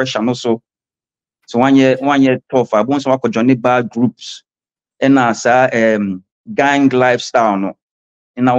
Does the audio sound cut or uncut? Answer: uncut